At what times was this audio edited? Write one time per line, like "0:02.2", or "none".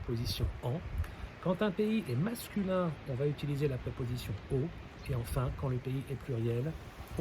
none